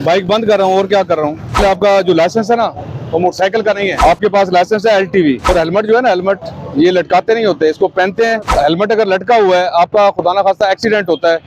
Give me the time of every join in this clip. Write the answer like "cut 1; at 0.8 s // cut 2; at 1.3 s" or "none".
cut 1; at 1.6 s // cut 2; at 4.0 s // cut 3; at 5.5 s // cut 4; at 8.5 s